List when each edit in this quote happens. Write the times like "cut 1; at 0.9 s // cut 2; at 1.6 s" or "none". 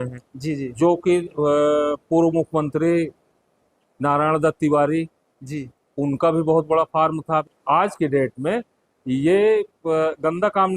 cut 1; at 7.5 s